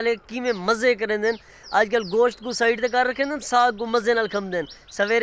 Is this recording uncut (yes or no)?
yes